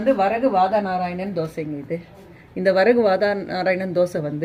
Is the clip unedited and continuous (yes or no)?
yes